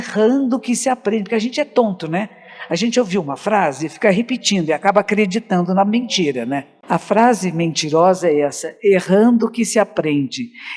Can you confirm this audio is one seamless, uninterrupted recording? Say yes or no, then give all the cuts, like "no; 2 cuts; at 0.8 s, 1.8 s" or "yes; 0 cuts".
no; 1 cut; at 6.7 s